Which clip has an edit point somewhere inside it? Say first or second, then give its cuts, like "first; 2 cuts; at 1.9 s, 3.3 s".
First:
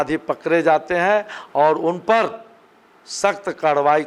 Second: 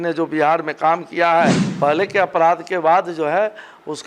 second; 1 cut; at 1.6 s